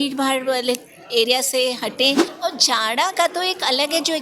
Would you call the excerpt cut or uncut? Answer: cut